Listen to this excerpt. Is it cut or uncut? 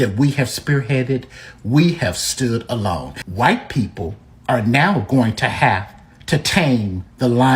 cut